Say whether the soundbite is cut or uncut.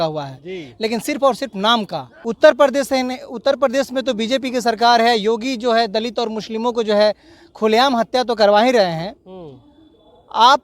cut